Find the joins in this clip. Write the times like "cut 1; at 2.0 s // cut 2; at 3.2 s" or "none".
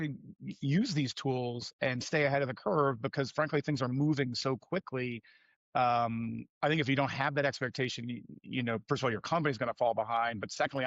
none